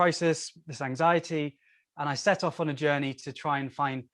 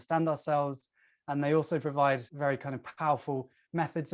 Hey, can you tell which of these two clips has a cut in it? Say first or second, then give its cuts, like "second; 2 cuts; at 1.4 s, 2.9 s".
second; 1 cut; at 2.3 s